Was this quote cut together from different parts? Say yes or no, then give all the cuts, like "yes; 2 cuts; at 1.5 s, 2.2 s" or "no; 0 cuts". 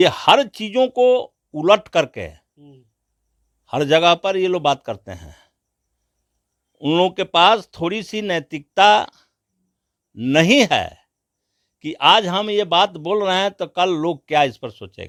no; 0 cuts